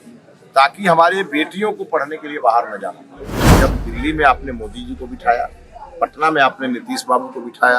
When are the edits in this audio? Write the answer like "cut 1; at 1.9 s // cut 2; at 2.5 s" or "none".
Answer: cut 1; at 3.4 s